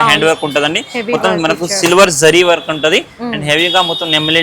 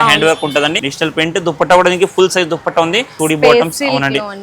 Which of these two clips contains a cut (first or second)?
second